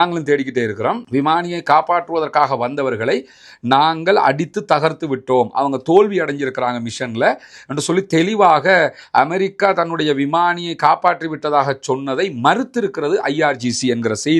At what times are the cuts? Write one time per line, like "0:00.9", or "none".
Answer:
none